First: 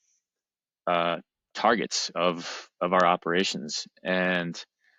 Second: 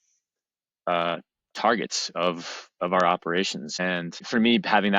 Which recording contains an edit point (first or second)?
second